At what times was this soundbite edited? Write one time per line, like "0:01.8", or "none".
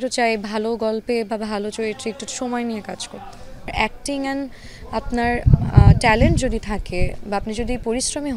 0:03.7

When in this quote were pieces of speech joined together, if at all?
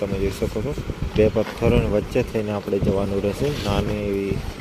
none

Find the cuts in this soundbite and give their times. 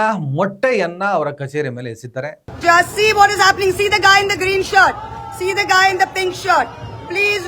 0:02.4

